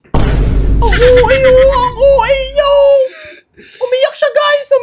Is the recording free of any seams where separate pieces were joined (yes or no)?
yes